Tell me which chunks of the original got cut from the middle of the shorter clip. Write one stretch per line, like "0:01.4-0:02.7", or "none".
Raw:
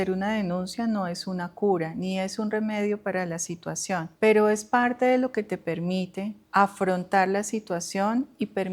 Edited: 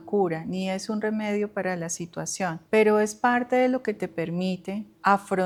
none